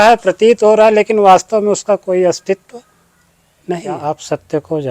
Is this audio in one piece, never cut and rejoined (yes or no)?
no